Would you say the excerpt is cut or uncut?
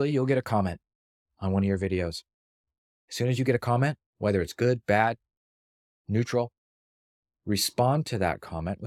uncut